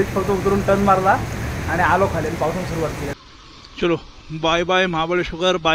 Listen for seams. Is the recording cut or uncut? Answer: cut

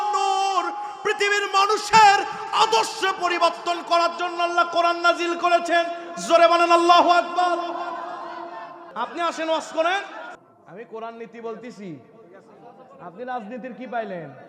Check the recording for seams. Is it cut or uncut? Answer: cut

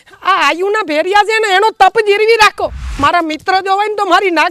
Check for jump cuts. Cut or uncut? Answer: cut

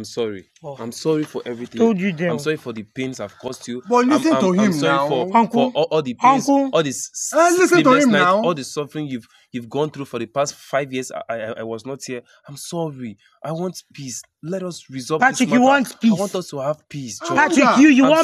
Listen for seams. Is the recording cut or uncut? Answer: uncut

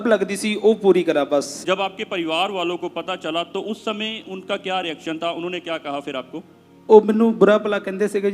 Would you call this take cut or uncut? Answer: uncut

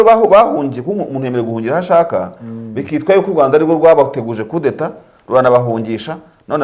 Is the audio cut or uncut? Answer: uncut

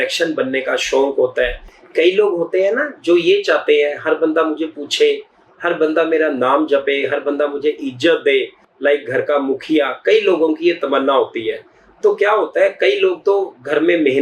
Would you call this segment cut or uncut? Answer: uncut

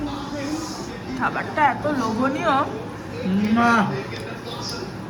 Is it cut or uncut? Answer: uncut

